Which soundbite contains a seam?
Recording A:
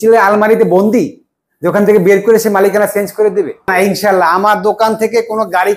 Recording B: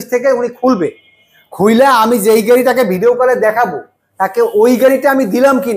A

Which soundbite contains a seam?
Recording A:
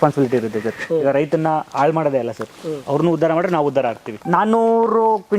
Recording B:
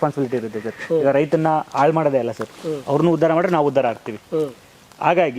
A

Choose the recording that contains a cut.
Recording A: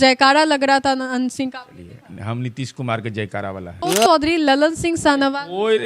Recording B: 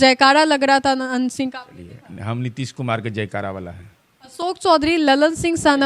A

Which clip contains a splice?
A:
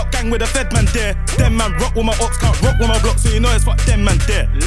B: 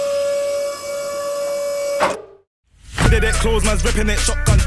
B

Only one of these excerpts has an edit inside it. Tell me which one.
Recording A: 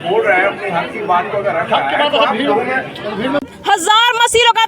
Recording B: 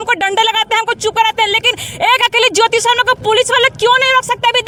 A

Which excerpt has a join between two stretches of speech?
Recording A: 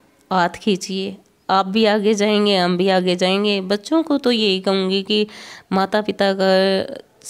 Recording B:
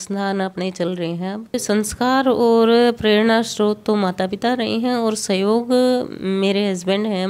B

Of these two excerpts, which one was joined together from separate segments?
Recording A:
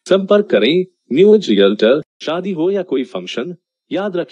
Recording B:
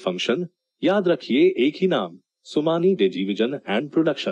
A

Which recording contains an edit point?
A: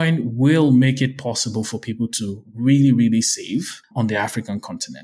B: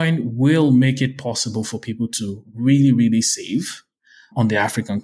A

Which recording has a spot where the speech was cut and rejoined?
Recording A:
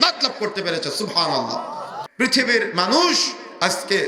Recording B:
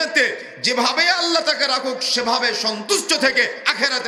A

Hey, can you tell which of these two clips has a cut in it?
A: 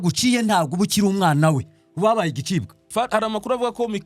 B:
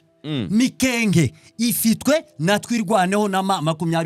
A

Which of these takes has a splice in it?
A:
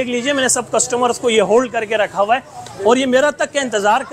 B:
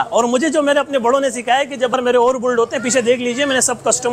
B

